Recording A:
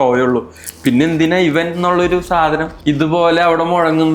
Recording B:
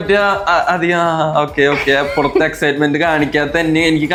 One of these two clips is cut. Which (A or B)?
A